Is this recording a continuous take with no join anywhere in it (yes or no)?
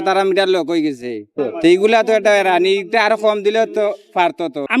yes